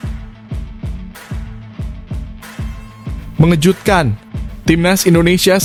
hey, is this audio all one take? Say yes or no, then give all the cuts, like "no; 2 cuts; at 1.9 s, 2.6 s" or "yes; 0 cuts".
yes; 0 cuts